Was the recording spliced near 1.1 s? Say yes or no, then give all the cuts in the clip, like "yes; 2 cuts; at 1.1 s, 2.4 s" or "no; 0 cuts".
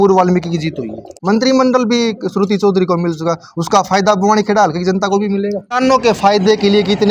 yes; 2 cuts; at 1.1 s, 5.7 s